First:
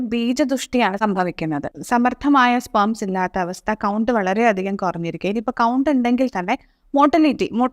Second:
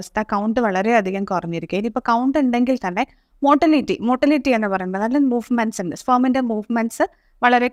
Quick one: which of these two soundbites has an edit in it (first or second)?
first